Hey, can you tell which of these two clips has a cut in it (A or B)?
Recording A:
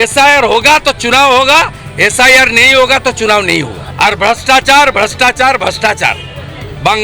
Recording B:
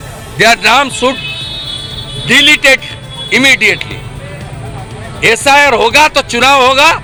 A